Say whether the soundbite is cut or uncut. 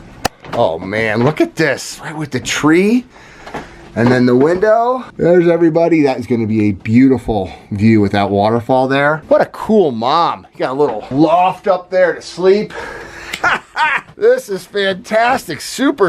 uncut